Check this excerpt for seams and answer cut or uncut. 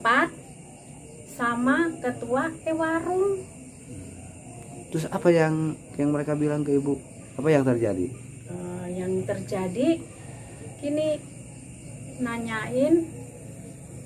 uncut